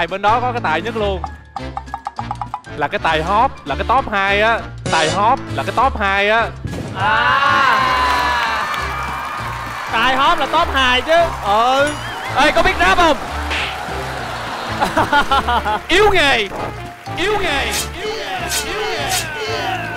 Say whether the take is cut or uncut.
uncut